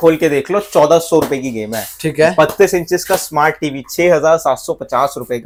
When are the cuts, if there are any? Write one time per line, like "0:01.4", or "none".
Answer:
none